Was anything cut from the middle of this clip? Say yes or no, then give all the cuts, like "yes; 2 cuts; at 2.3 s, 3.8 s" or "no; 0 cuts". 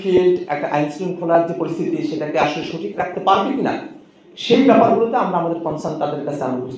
no; 0 cuts